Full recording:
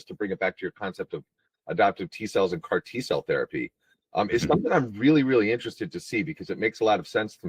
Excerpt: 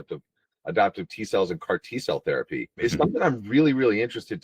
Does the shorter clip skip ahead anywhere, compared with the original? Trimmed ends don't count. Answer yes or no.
yes